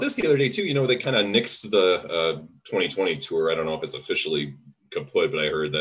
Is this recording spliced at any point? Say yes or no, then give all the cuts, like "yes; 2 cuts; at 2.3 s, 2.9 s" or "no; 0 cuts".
no; 0 cuts